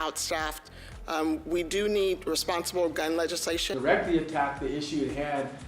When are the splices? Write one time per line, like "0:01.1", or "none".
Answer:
0:03.7